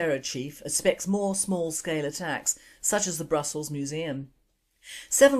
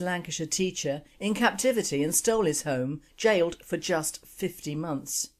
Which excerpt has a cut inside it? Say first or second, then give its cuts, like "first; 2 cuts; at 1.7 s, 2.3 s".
first; 1 cut; at 3.9 s